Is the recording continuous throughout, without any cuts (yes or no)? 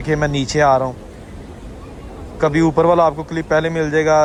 yes